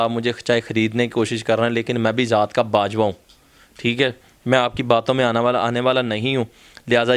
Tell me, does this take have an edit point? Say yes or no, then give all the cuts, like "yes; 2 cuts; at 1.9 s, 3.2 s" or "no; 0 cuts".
no; 0 cuts